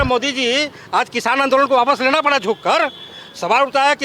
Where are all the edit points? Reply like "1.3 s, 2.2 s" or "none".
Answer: none

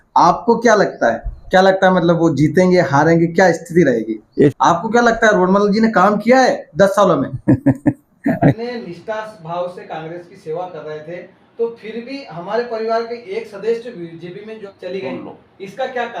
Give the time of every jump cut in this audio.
1.4 s, 4.5 s, 8.6 s, 14.6 s

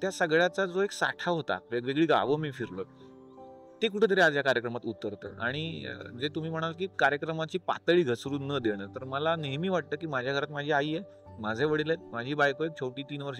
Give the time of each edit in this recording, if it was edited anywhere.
none

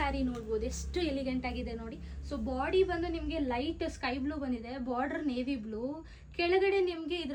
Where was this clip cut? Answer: none

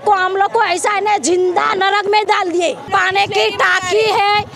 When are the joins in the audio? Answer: 2.9 s

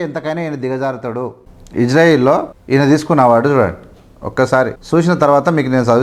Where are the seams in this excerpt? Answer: 1.5 s, 2.5 s, 4.8 s

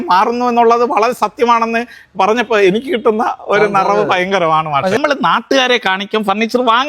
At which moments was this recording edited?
5.0 s

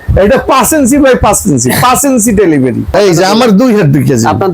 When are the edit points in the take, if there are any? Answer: 2.9 s

